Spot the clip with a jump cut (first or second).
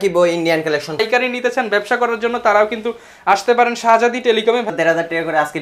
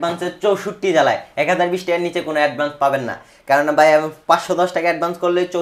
first